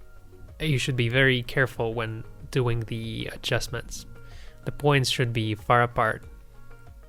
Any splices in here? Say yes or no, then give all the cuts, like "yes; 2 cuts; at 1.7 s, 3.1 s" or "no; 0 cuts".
no; 0 cuts